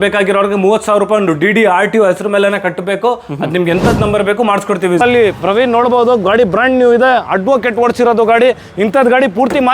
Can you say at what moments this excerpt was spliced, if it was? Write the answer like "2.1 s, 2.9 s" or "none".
5.0 s